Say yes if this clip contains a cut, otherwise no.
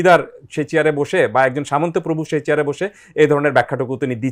no